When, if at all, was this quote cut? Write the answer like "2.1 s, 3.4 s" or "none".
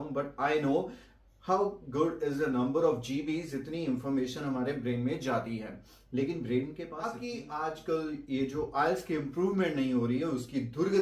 7.2 s